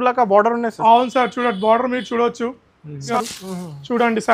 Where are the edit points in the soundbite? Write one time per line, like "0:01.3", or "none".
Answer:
0:03.1